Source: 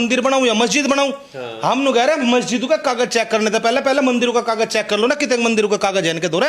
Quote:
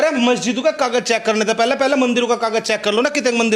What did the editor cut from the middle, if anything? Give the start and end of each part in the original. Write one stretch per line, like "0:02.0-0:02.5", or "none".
none